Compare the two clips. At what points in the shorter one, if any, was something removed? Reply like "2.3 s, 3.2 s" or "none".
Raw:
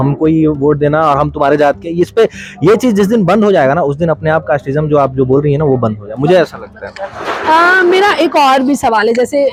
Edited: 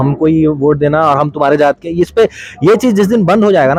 none